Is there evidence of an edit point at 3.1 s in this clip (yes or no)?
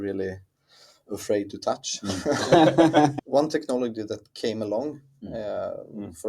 yes